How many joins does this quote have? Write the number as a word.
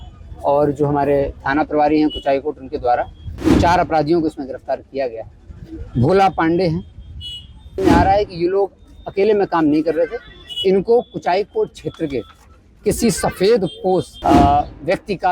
two